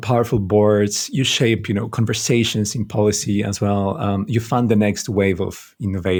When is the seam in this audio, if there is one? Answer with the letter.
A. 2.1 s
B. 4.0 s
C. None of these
C